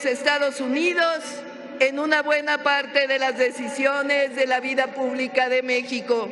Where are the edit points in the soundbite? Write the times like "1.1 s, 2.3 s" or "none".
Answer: none